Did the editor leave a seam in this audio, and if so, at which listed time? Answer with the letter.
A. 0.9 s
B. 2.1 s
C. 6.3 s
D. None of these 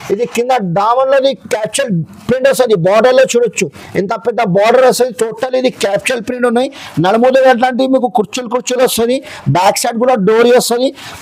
D